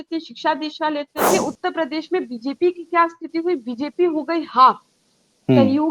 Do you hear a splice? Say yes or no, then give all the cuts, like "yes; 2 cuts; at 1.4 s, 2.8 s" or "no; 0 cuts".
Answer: yes; 1 cut; at 1.1 s